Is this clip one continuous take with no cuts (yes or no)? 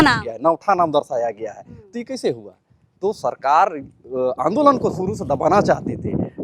yes